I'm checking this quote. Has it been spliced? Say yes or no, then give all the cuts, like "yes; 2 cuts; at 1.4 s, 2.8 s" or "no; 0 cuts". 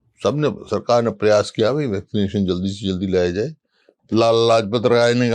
yes; 1 cut; at 3.9 s